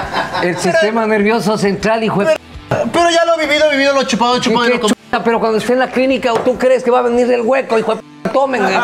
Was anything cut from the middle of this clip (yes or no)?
no